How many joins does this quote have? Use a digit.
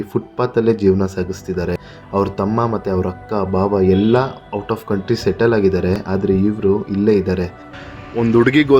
1